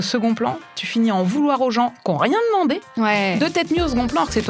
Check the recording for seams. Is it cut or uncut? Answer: uncut